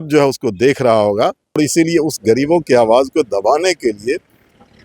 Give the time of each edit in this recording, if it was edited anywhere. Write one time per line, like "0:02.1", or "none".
0:01.6